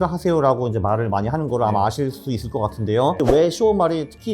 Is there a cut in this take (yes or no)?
yes